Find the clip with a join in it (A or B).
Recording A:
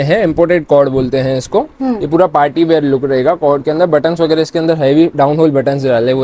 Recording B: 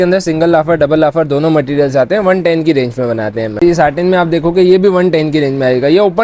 B